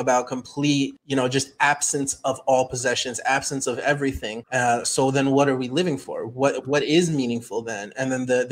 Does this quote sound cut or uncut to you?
cut